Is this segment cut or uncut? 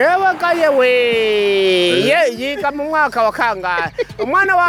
uncut